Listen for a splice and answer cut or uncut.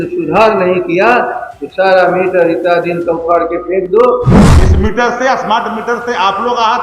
cut